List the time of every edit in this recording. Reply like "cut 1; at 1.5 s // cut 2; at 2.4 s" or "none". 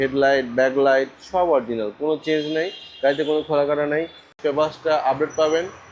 cut 1; at 4.3 s